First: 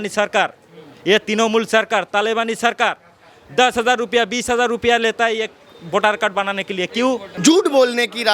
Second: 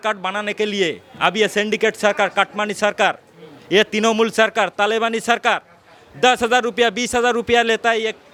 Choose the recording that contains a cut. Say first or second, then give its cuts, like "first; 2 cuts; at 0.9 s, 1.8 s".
first; 1 cut; at 7.3 s